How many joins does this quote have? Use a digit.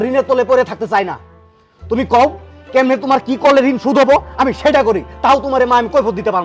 0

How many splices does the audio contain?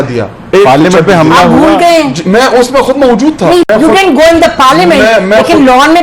1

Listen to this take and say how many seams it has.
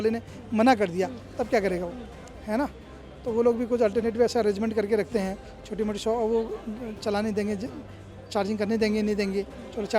0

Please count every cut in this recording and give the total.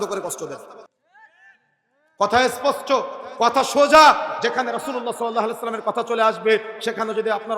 0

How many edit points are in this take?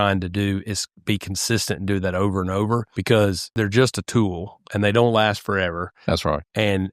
2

